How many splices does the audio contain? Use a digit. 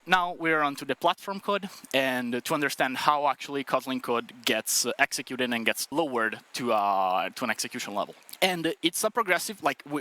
2